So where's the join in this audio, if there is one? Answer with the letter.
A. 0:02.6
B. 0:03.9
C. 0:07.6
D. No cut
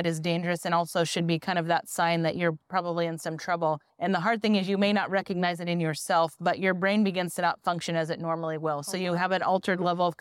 B